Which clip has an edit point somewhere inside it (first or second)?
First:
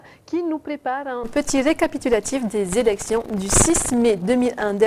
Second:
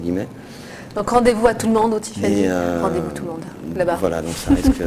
first